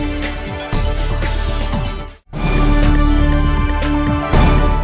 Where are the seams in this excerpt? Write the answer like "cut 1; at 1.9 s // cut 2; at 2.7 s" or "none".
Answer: cut 1; at 2.2 s